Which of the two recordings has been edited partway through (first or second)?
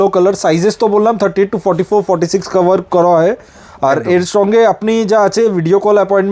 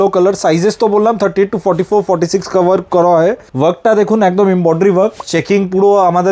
second